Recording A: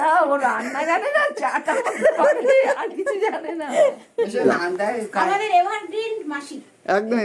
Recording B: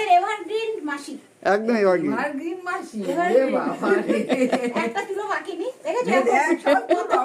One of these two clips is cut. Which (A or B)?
A